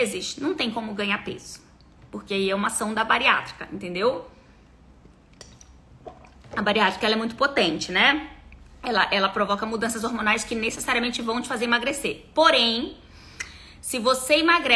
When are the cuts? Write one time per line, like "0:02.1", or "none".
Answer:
none